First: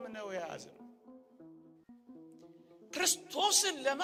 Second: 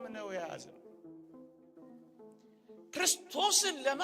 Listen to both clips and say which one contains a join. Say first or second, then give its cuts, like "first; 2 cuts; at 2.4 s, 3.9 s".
second; 2 cuts; at 1.0 s, 2.9 s